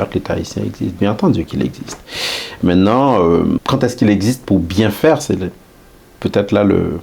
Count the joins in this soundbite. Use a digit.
1